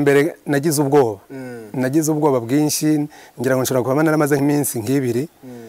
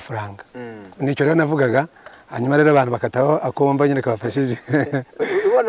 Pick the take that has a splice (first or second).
first